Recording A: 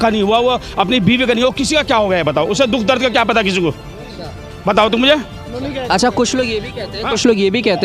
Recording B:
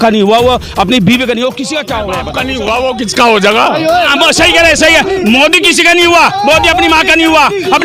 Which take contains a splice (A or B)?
B